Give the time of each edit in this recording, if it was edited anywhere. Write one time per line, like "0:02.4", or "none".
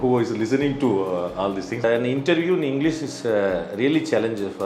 0:01.8